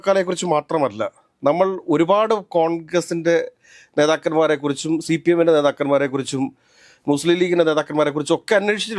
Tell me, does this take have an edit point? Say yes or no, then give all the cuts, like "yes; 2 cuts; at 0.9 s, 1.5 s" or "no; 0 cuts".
no; 0 cuts